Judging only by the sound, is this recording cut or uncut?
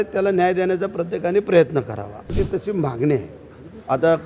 cut